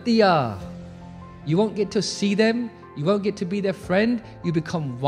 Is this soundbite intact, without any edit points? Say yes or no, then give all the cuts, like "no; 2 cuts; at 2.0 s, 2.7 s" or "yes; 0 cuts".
yes; 0 cuts